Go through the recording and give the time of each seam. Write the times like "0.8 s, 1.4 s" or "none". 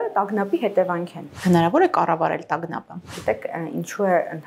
1.4 s, 3.2 s